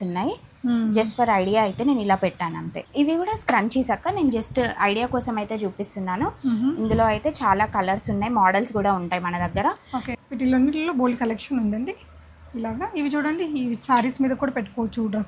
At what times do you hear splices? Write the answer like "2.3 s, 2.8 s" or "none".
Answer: 2.8 s, 10.1 s